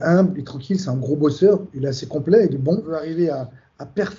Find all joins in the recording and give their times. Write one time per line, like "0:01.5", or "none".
0:03.0